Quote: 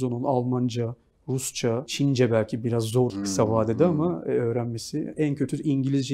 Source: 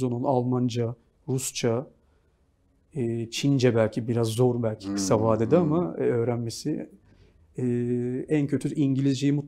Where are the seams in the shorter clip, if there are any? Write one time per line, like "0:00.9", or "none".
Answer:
0:01.9
0:03.1
0:05.1